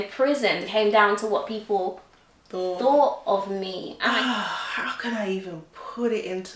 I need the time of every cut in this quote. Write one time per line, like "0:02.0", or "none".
0:04.0